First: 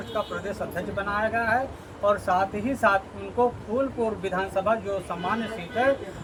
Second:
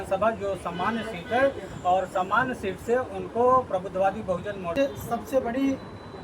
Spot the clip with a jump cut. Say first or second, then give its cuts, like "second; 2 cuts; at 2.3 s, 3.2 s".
second; 1 cut; at 4.8 s